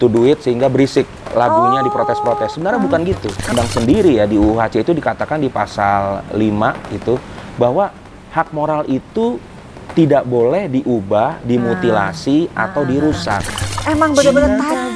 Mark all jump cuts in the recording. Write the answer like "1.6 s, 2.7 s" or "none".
3.5 s, 13.5 s